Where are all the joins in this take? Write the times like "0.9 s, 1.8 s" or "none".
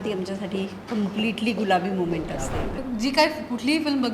2.8 s